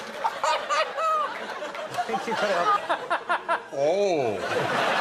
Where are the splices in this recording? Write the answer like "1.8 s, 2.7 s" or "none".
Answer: none